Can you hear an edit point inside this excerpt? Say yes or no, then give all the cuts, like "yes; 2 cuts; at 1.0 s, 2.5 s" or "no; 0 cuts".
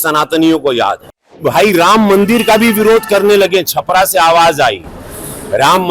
yes; 1 cut; at 1.4 s